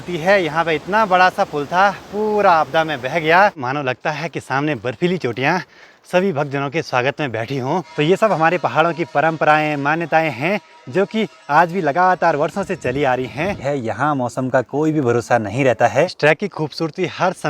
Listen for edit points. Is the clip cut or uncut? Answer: cut